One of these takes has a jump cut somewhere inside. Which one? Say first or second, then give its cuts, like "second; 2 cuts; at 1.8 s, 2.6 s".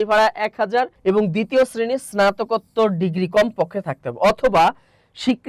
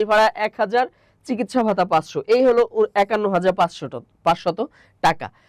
first; 1 cut; at 0.9 s